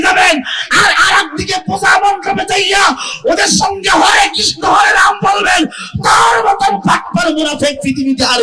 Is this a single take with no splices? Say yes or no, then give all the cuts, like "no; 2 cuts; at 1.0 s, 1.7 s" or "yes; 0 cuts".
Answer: yes; 0 cuts